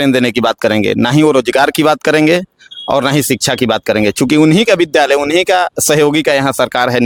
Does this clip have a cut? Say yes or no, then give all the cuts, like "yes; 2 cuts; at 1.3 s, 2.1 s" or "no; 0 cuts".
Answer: no; 0 cuts